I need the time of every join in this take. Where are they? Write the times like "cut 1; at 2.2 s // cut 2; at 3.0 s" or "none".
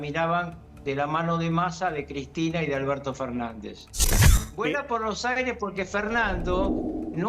cut 1; at 4.1 s